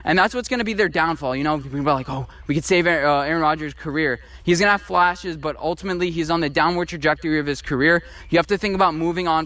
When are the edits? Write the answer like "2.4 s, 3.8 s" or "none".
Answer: 2.3 s

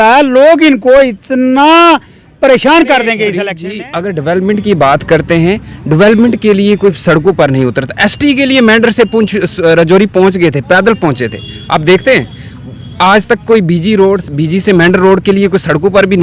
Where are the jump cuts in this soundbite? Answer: 3.5 s

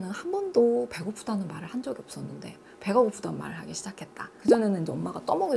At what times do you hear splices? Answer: 4.4 s

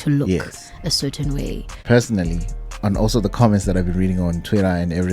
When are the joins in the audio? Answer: 1.8 s

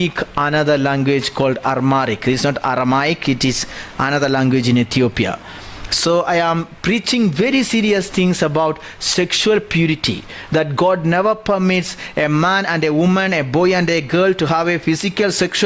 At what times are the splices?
none

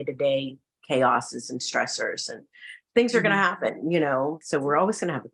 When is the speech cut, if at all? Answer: 4.4 s

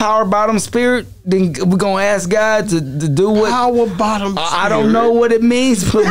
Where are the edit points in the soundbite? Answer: none

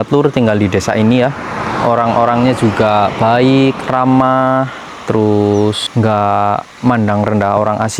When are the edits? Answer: 5.8 s

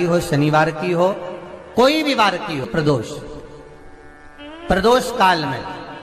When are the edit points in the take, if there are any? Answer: 2.7 s

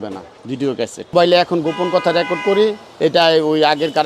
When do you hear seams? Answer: 1.1 s, 2.9 s

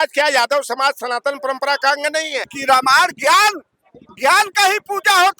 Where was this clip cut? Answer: 2.4 s

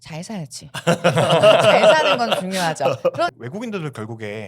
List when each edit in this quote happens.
3.3 s

